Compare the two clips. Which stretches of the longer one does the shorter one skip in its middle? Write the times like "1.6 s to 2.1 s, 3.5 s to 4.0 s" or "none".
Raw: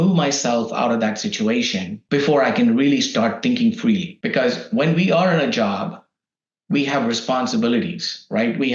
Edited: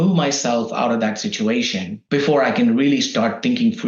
none